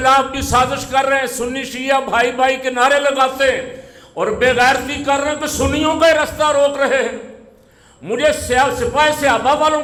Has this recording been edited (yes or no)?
no